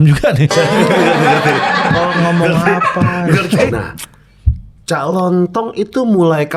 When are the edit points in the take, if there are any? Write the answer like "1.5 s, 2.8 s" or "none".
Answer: 3.7 s